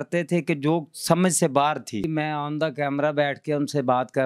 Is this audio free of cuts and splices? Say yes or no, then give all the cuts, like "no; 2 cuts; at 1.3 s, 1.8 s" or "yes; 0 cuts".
no; 1 cut; at 2.1 s